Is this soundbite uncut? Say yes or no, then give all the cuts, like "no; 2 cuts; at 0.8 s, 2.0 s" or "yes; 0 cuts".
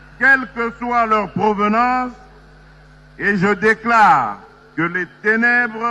yes; 0 cuts